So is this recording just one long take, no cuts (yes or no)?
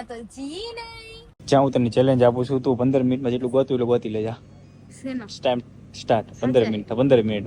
no